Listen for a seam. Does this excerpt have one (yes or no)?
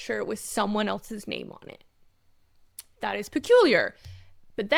no